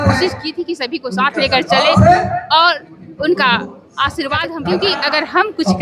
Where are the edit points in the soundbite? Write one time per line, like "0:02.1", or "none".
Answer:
0:04.5